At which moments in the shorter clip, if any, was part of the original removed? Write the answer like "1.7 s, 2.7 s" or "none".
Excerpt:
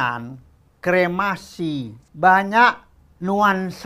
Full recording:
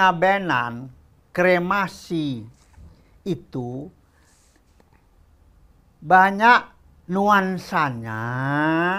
2.0 s